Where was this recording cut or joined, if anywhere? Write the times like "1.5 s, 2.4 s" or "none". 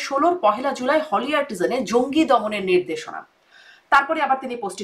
none